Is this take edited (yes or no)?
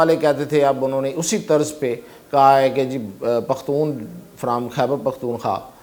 no